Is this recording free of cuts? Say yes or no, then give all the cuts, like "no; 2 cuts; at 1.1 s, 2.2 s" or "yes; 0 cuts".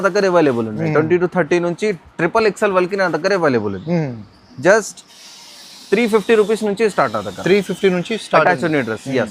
yes; 0 cuts